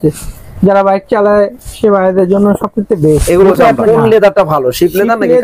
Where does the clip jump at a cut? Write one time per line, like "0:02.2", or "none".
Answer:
0:03.8